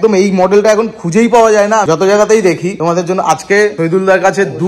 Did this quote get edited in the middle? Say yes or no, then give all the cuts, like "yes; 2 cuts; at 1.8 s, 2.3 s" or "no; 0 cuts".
yes; 3 cuts; at 1.8 s, 2.7 s, 3.8 s